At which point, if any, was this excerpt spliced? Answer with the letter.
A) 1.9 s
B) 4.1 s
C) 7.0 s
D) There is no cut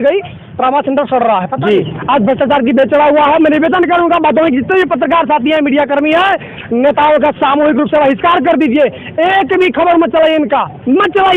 A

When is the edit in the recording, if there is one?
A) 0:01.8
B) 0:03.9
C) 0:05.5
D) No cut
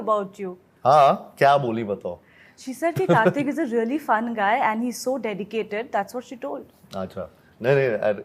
D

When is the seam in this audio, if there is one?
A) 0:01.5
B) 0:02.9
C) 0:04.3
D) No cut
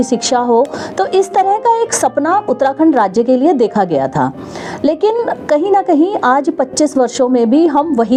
D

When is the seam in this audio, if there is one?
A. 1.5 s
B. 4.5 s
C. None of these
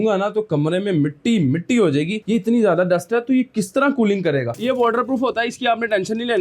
B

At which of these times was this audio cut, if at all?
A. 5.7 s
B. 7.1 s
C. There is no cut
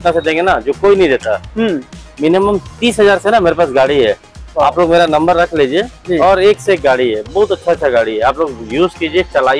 C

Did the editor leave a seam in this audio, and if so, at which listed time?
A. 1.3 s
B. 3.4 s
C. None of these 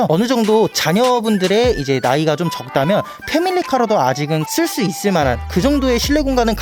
C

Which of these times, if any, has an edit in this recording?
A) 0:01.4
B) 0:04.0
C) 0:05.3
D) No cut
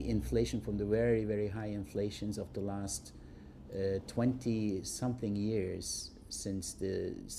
C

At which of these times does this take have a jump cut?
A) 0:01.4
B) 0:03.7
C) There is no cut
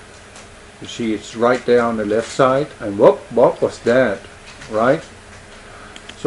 A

